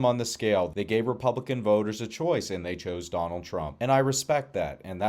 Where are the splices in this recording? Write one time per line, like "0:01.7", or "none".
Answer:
0:03.7